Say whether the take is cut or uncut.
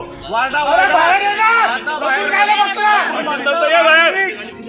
uncut